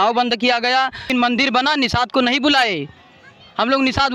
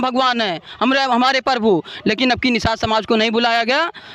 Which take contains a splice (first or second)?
first